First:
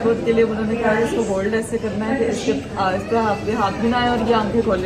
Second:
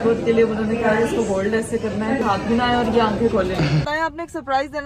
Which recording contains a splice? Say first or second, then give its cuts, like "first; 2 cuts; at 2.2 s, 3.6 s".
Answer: second; 2 cuts; at 2.2 s, 3.9 s